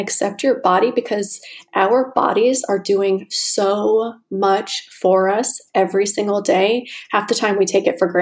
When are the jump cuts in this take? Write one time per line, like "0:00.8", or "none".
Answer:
none